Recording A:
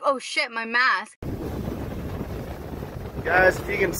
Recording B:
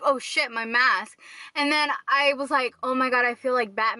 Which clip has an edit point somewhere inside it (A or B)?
A